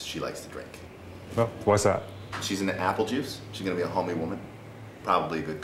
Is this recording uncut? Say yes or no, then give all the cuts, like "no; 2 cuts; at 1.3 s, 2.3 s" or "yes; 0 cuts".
yes; 0 cuts